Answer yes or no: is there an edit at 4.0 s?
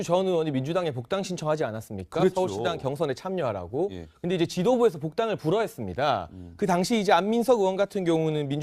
no